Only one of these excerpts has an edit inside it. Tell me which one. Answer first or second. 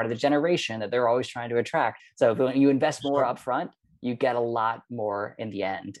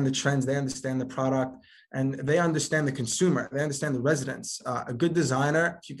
first